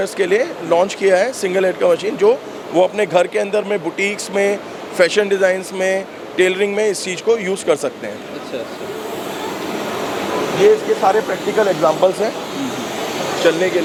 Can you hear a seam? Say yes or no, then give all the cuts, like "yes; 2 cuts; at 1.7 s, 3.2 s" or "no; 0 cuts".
no; 0 cuts